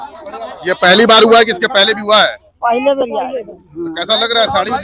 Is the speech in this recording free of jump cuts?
yes; 0 cuts

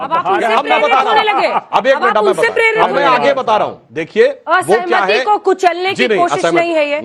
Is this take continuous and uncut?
yes; 0 cuts

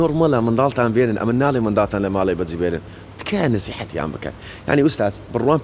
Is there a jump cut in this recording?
no; 0 cuts

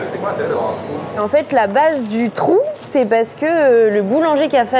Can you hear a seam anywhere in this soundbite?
yes; 1 cut; at 1.1 s

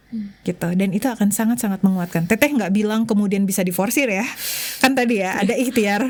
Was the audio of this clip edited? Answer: no; 0 cuts

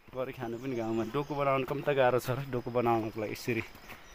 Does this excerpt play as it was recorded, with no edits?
yes; 0 cuts

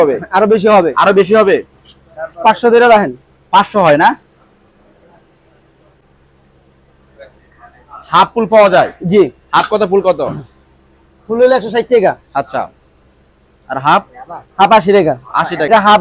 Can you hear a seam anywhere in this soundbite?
no; 0 cuts

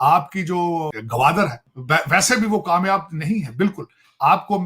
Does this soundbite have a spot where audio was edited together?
yes; 2 cuts; at 1.0 s, 1.7 s

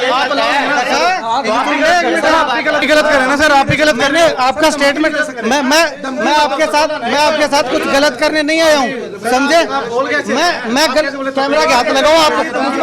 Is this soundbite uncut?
yes; 0 cuts

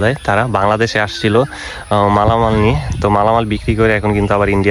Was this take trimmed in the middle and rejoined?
no; 0 cuts

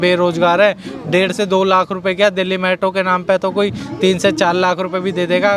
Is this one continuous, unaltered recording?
yes; 0 cuts

